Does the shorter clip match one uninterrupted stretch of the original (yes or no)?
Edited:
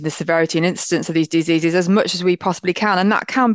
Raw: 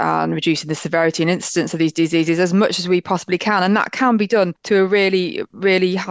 yes